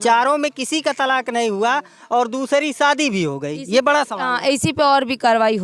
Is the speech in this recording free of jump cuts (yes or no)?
yes